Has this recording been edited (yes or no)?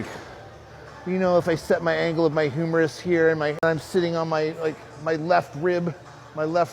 yes